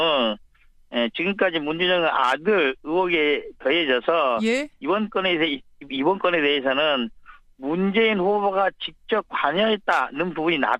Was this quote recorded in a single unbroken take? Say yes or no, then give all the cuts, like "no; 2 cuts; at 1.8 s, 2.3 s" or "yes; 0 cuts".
yes; 0 cuts